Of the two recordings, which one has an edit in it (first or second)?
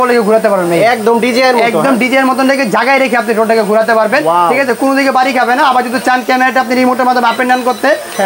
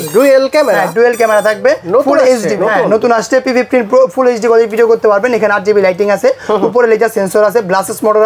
second